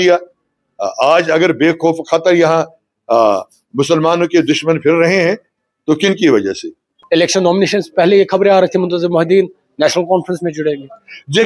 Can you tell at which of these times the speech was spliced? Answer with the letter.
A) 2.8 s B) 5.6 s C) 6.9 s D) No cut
C